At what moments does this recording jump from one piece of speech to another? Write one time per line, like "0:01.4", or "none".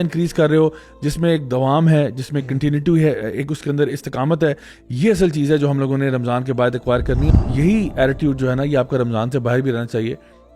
0:07.3